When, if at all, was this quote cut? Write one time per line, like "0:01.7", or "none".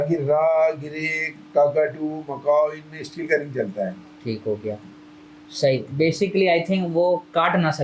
none